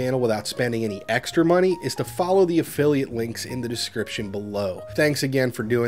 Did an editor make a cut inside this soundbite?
yes; 1 cut; at 4.9 s

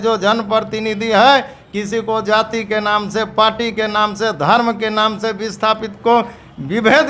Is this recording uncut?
yes; 0 cuts

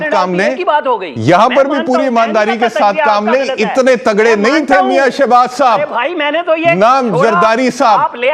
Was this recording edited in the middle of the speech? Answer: no; 0 cuts

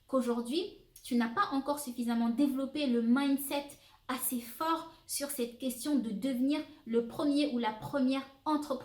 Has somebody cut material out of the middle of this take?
no; 0 cuts

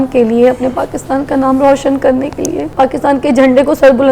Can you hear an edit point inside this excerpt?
yes; 1 cut; at 2.6 s

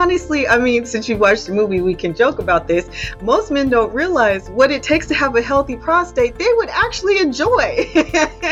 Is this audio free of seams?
yes; 0 cuts

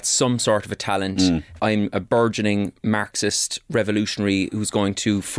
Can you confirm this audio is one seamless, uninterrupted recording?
no; 1 cut; at 1.6 s

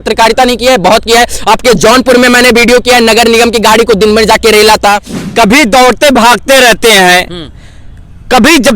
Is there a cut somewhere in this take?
yes; 1 cut; at 5.1 s

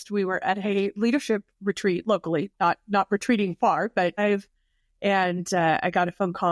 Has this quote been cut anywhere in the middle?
yes; 1 cut; at 4.2 s

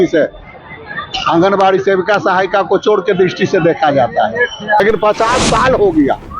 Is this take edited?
yes; 1 cut; at 4.8 s

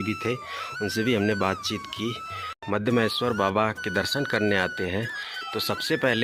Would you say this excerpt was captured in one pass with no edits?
no; 1 cut; at 2.6 s

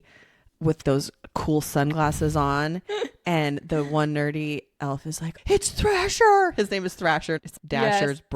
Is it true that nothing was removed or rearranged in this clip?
no; 1 cut; at 5.2 s

